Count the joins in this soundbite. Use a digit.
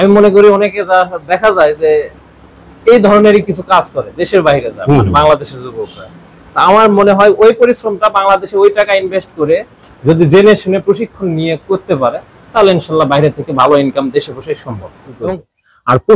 1